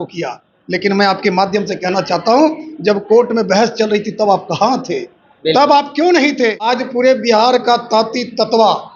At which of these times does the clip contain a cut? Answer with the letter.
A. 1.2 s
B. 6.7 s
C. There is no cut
B